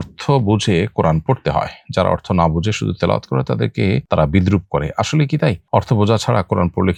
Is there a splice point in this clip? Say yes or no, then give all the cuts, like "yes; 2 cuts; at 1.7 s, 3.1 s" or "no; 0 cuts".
no; 0 cuts